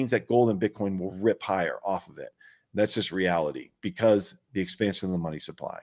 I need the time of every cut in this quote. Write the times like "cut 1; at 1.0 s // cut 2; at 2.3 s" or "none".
none